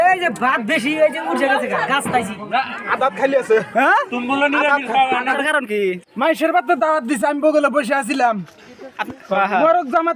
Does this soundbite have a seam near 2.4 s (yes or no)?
yes